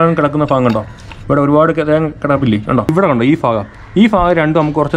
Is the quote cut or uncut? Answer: cut